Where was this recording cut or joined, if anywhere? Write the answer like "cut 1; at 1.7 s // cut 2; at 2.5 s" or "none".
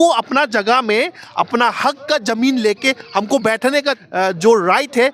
cut 1; at 4.0 s